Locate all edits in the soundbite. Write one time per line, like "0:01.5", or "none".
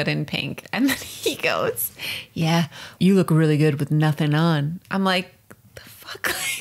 0:03.0